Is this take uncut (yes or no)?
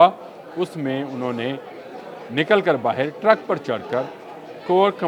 yes